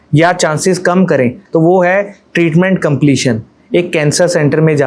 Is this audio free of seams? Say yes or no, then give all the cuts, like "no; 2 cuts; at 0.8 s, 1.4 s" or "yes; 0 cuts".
yes; 0 cuts